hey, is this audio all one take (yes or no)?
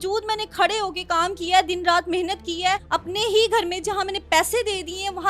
no